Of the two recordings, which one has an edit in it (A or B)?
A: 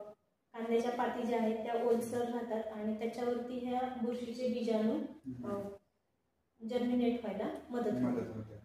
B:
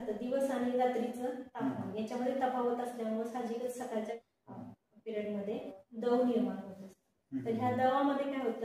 B